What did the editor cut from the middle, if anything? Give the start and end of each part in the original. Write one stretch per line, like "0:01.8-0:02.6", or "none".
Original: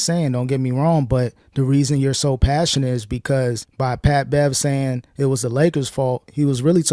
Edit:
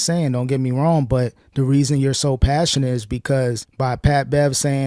none